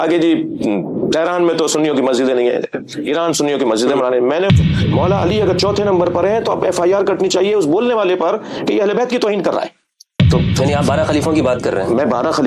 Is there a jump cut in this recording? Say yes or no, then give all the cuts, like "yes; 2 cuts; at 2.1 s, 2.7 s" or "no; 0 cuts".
yes; 2 cuts; at 4.5 s, 10.3 s